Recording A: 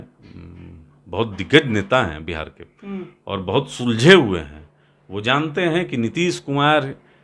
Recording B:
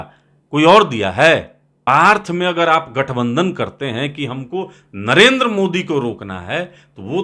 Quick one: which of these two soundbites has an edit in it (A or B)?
B